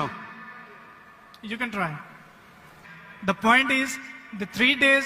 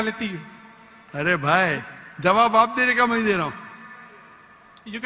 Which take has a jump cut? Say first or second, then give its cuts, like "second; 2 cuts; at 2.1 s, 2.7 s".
first; 1 cut; at 2.7 s